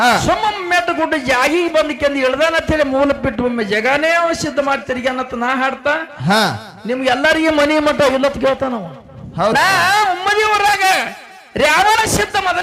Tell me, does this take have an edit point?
yes; 1 cut; at 9.5 s

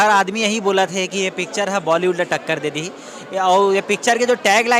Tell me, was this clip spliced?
no; 0 cuts

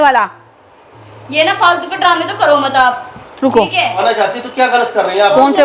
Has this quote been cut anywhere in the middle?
yes; 1 cut; at 4.0 s

